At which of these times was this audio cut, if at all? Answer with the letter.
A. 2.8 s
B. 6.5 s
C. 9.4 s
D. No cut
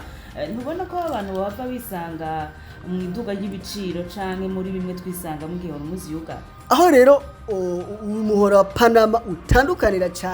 B